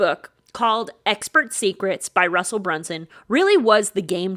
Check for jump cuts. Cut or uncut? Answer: uncut